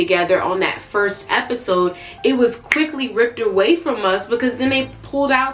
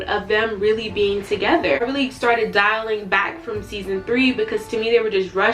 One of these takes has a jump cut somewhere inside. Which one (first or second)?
second